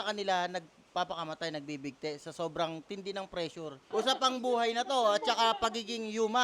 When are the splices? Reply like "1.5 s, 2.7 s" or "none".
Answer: 3.8 s